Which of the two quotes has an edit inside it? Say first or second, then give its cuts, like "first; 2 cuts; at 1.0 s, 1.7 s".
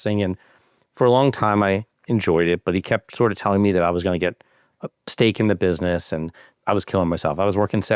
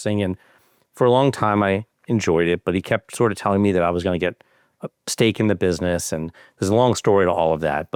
first; 1 cut; at 6.5 s